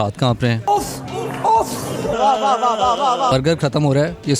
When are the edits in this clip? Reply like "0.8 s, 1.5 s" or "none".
none